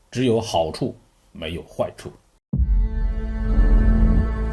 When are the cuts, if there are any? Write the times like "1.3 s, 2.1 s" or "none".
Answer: 2.3 s